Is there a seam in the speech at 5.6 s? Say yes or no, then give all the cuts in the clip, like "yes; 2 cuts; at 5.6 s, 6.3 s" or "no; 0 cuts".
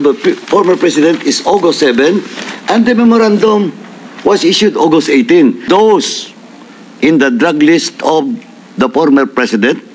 yes; 1 cut; at 5.6 s